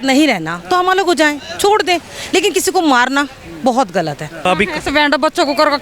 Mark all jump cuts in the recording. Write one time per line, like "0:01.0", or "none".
0:04.5